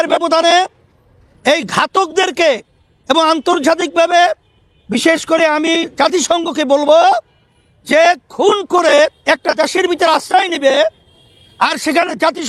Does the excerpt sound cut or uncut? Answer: uncut